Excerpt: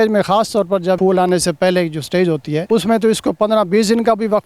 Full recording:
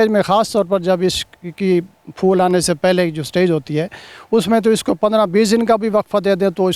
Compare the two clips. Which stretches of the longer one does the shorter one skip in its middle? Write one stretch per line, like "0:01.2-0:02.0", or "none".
0:01.0-0:02.2
0:03.9-0:04.3